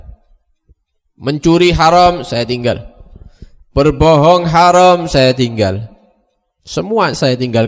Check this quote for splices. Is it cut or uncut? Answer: uncut